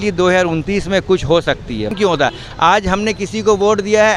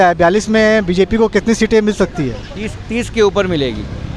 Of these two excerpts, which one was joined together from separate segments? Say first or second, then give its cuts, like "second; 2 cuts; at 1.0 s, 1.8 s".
first; 1 cut; at 1.9 s